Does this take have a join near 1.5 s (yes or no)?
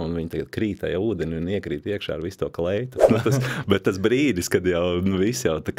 no